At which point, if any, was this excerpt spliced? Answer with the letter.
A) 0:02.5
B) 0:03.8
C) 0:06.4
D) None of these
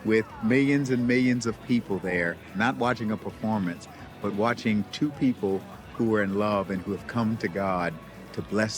A